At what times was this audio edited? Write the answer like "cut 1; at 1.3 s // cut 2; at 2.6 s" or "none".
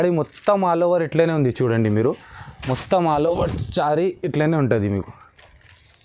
none